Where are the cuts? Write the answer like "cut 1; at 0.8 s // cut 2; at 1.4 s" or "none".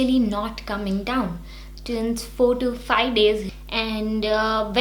cut 1; at 3.6 s